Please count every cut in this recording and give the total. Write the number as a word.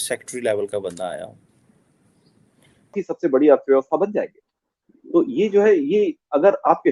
one